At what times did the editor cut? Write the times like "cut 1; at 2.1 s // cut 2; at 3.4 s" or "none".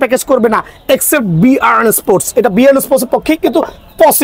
none